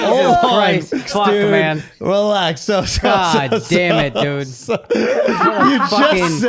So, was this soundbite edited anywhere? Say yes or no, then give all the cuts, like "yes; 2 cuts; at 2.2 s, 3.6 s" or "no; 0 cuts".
yes; 1 cut; at 1.1 s